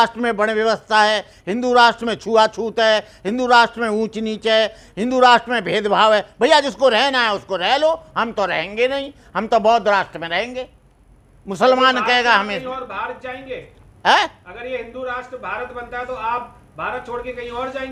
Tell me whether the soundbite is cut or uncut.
uncut